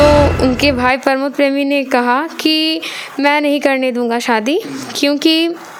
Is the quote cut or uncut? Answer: uncut